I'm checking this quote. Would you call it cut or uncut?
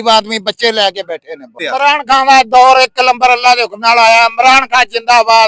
cut